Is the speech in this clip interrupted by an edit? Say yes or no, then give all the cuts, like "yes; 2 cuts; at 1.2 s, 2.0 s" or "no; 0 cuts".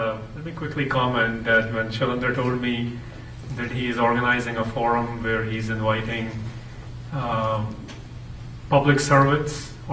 no; 0 cuts